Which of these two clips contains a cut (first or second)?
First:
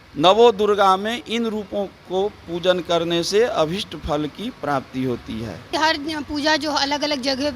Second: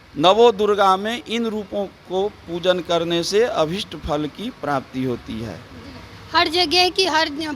first